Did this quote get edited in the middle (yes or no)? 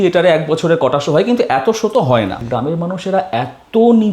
yes